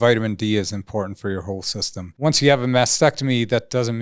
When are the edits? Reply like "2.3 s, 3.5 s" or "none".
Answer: 2.1 s